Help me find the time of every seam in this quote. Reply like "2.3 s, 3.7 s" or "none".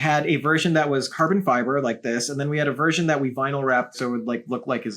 4.0 s